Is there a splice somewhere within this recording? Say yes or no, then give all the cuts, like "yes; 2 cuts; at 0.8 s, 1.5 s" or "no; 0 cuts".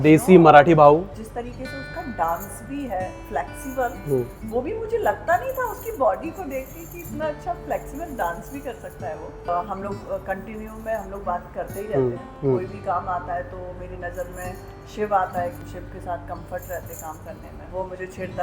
yes; 5 cuts; at 1.2 s, 9.5 s, 12.3 s, 15.6 s, 17.6 s